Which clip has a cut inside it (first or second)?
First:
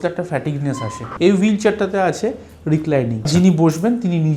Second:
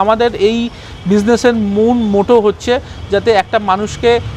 first